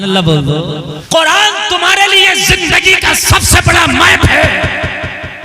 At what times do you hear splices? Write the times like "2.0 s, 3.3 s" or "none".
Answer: 0.9 s